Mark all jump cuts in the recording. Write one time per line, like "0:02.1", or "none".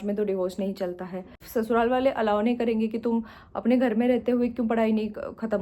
0:01.4